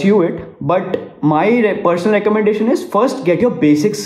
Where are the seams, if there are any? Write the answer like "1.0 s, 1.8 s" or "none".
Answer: none